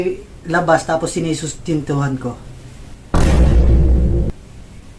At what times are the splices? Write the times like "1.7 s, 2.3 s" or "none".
none